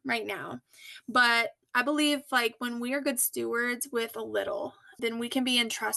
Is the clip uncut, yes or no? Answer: no